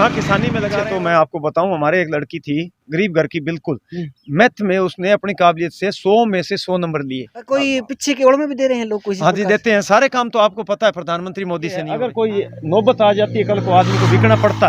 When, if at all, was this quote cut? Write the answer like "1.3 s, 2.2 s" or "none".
0.8 s, 7.3 s, 12.0 s